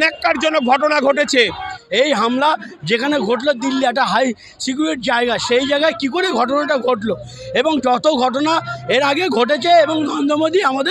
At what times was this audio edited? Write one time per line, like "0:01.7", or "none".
0:01.7